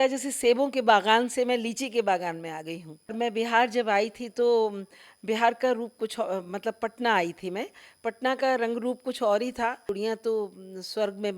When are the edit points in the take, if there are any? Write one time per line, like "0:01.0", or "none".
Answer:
0:03.1
0:09.9